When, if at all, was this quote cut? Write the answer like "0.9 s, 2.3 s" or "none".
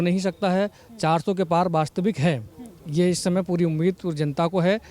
none